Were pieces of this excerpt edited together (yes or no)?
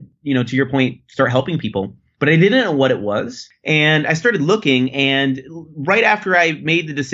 no